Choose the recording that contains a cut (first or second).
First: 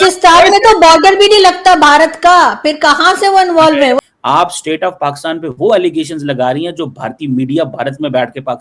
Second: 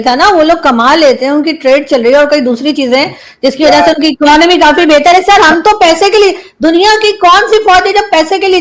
first